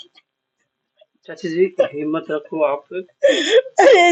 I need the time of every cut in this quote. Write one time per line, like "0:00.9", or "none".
none